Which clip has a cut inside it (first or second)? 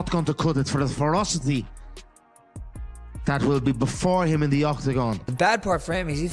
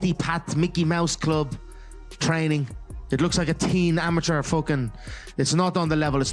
first